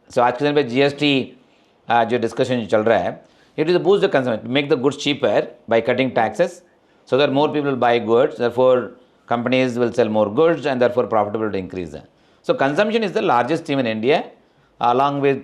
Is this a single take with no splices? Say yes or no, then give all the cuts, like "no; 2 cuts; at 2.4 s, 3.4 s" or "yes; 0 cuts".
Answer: yes; 0 cuts